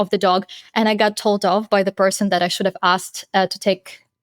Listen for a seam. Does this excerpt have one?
no; 0 cuts

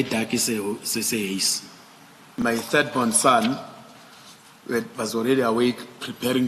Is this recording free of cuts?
no; 1 cut; at 2.2 s

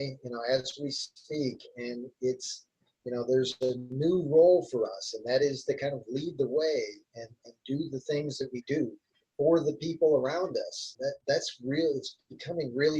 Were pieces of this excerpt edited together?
yes; 1 cut; at 10.8 s

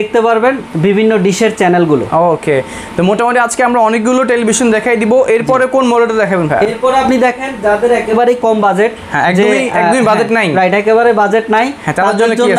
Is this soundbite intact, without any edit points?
yes; 0 cuts

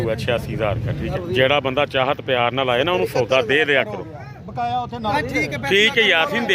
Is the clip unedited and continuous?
no; 2 cuts; at 1.2 s, 5.1 s

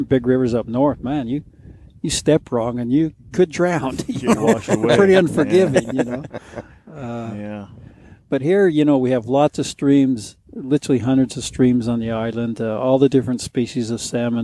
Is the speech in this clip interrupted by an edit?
no; 0 cuts

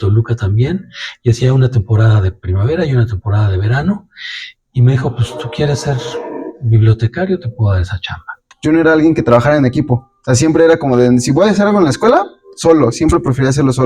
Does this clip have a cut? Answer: yes; 1 cut; at 8.4 s

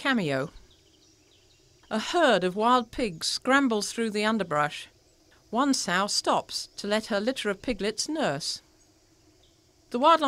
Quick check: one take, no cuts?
yes; 0 cuts

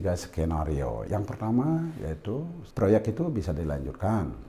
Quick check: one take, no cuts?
no; 2 cuts; at 1.0 s, 2.6 s

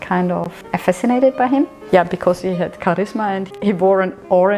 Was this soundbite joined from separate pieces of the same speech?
no; 0 cuts

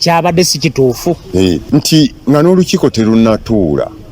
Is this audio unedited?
no; 1 cut; at 1.6 s

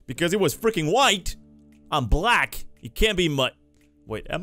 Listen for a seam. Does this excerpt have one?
no; 0 cuts

